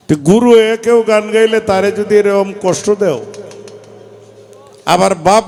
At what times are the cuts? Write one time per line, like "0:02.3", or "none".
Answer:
none